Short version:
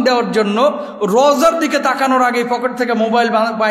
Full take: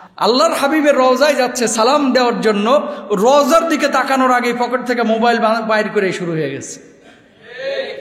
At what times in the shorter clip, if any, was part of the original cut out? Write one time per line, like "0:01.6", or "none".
none